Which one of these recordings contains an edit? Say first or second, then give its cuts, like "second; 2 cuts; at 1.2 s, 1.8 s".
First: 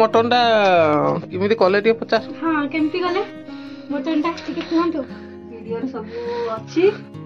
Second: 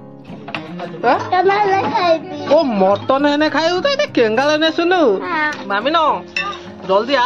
second; 1 cut; at 5.6 s